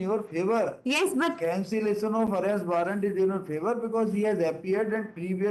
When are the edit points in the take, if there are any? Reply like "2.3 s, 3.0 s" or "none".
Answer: none